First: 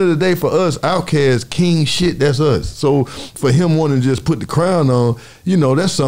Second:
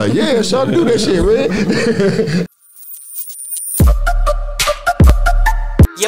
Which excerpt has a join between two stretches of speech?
second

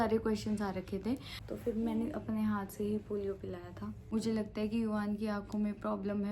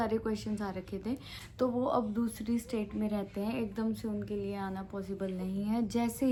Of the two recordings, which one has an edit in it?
first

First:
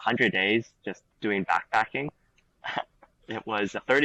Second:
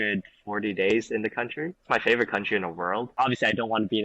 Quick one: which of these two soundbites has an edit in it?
second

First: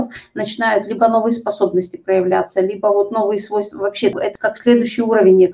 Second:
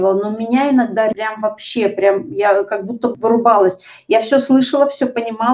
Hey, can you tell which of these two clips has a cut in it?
second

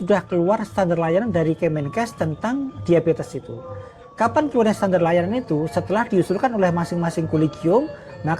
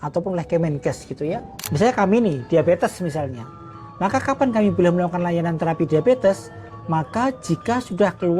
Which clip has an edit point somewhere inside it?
second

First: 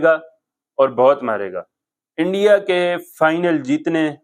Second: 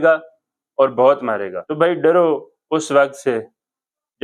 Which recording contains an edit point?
second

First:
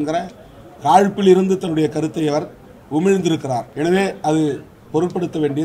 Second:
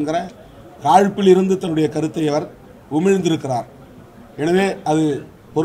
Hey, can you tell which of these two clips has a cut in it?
first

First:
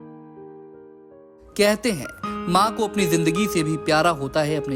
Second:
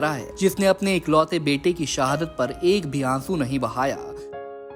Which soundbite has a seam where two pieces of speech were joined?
first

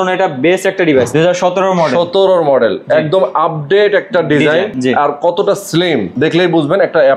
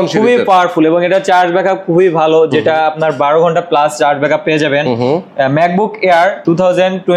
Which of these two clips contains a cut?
first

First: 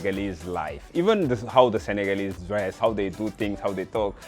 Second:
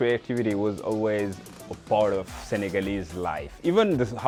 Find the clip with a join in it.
first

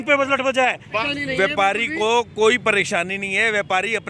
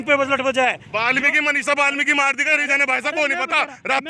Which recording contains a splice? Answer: first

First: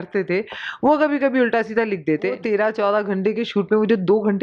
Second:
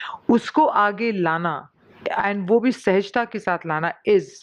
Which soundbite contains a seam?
first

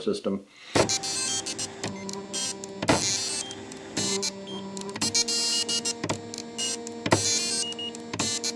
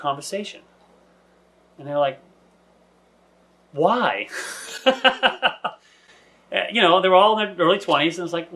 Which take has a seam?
first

